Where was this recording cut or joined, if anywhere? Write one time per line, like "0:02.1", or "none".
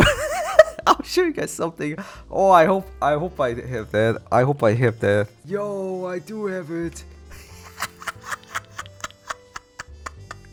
none